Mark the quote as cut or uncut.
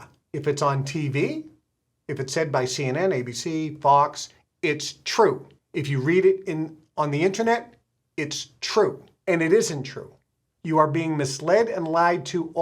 cut